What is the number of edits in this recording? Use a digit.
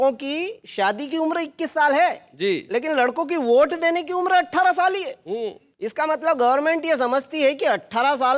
0